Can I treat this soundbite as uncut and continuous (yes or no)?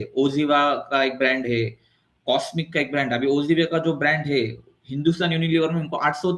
yes